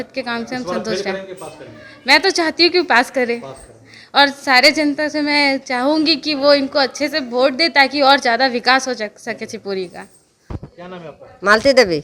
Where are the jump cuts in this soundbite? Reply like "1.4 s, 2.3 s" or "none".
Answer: none